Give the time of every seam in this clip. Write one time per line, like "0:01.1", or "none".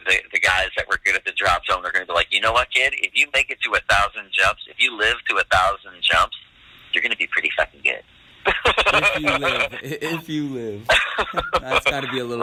none